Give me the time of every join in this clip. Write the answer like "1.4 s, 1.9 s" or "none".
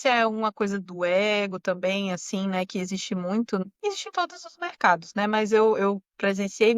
3.6 s